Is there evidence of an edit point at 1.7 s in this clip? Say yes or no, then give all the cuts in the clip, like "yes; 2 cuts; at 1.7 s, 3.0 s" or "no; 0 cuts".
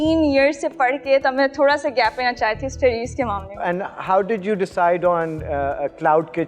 no; 1 cut; at 3.1 s